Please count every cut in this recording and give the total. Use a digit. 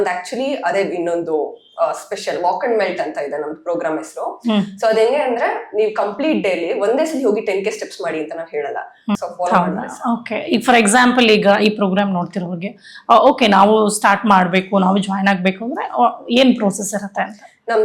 1